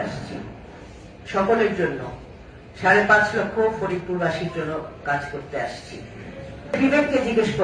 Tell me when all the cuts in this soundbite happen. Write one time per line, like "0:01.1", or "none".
0:06.7

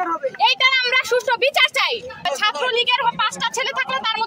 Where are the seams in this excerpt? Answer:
0:02.3

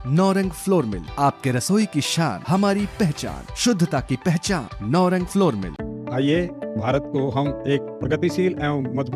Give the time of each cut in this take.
none

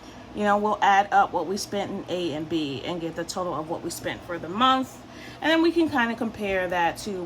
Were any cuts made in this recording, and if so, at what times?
none

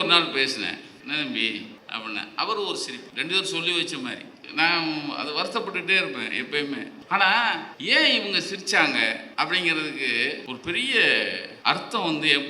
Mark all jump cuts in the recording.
0:00.9
0:01.8
0:03.0
0:04.4
0:07.0
0:07.7
0:09.2
0:10.4
0:11.5

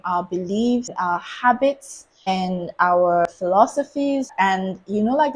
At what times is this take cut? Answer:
0:00.9
0:02.3
0:03.3
0:04.3

